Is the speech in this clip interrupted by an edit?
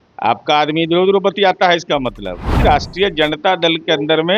yes; 1 cut; at 2.6 s

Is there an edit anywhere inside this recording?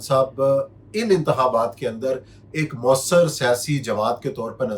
no; 0 cuts

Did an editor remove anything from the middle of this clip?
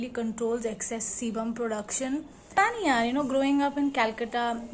yes; 1 cut; at 2.4 s

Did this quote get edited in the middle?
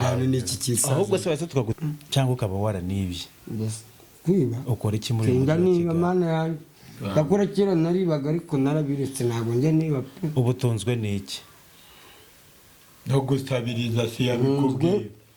yes; 1 cut; at 1.7 s

